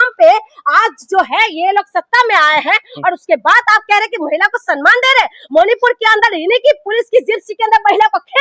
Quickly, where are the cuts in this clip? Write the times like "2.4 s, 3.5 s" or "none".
none